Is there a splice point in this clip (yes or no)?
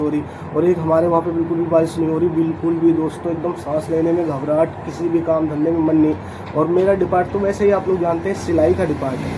no